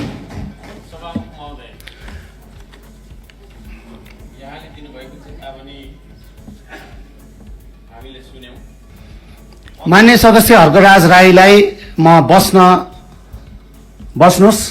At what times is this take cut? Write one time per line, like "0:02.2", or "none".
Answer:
0:08.9